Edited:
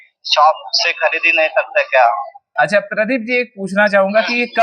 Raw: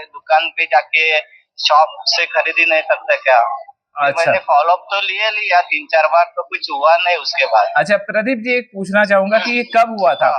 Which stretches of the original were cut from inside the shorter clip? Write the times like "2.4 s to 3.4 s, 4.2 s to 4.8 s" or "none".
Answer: 3.9 s to 7.7 s

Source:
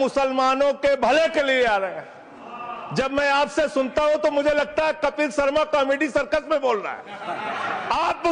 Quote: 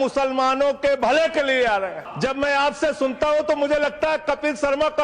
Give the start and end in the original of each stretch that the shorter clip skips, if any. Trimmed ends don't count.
2.0 s to 2.8 s

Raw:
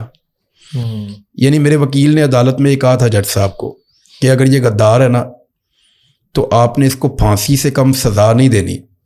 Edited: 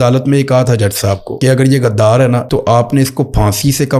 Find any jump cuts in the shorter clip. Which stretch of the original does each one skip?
3.6 s to 4.1 s, 5.3 s to 6.3 s

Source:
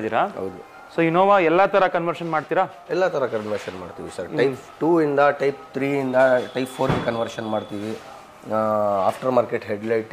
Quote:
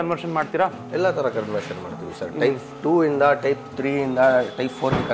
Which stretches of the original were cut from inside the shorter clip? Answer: none

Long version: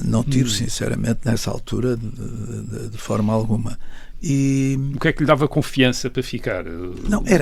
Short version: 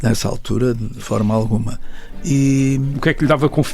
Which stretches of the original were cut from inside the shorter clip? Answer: 2.1 s to 2.9 s

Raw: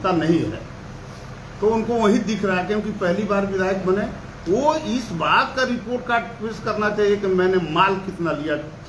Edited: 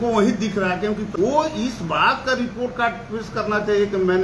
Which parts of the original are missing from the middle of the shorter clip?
2.9 s to 4.4 s

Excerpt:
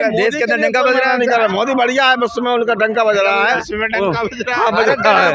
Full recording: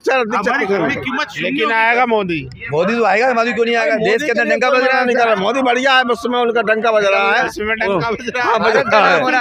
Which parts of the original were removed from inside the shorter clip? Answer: none

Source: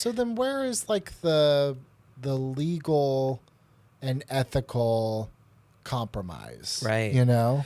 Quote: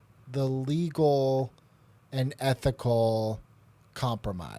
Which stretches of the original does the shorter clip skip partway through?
none

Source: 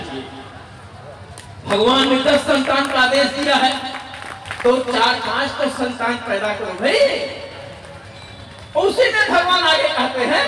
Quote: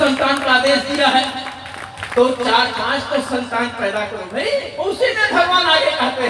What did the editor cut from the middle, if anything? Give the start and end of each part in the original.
7.2 s to 8.7 s

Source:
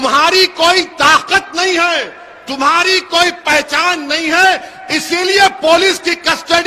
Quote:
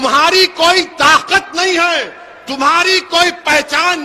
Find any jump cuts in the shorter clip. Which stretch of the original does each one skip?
none

